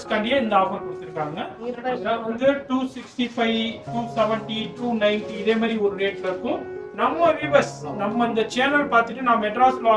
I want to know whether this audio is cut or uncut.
uncut